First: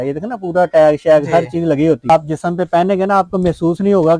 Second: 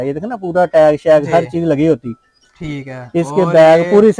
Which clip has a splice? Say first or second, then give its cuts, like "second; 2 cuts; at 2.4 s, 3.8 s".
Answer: first; 1 cut; at 2.1 s